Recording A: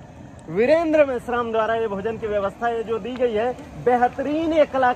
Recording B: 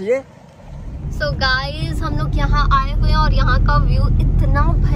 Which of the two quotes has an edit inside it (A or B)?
B